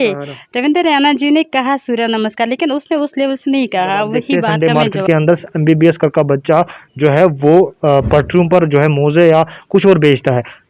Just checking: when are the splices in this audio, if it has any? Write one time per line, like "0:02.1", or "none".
0:04.5